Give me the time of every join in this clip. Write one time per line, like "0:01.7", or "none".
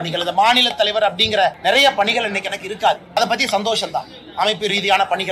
0:01.6
0:03.2